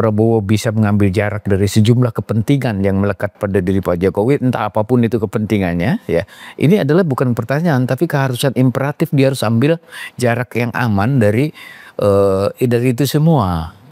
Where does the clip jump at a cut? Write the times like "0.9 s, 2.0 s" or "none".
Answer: none